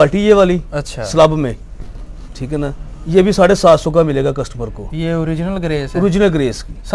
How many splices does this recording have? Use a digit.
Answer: 0